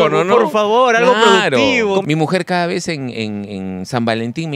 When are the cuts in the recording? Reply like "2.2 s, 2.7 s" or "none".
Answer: 2.0 s

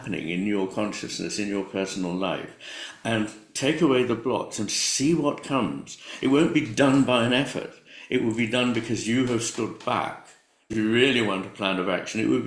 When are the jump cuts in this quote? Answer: 10.7 s

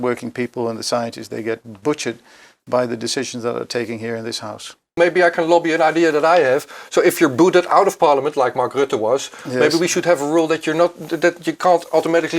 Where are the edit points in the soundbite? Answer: 5.0 s

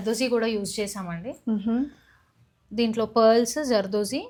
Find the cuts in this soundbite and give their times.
none

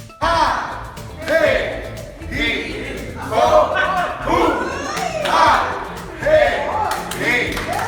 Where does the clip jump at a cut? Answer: 3.1 s

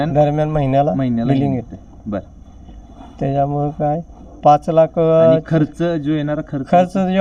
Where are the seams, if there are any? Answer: none

